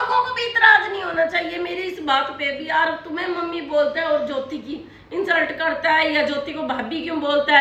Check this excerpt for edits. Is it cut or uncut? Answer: uncut